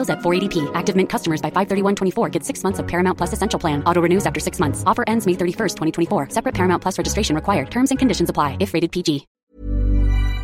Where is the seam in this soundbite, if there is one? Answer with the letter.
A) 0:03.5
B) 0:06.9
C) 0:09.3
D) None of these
C